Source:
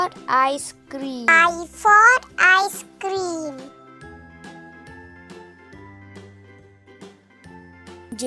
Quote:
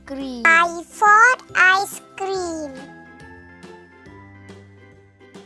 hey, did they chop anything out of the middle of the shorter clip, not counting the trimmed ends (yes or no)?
yes